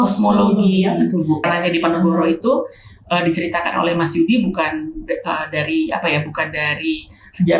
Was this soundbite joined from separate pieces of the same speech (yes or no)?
yes